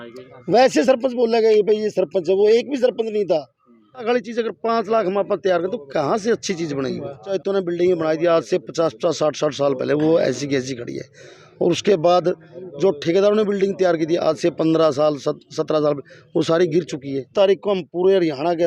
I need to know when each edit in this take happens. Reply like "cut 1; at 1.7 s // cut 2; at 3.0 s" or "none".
cut 1; at 4.0 s // cut 2; at 7.4 s // cut 3; at 17.3 s